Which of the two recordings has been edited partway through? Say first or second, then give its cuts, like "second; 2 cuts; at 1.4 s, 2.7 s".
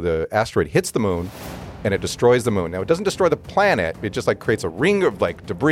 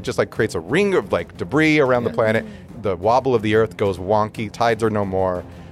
second; 2 cuts; at 2.6 s, 4.5 s